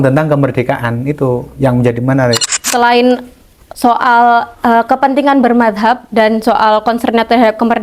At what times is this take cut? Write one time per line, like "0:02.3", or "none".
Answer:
0:02.6